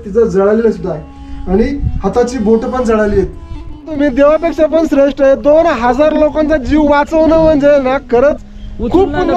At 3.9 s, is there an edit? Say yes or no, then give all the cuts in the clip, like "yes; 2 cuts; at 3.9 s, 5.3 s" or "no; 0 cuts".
yes; 1 cut; at 3.9 s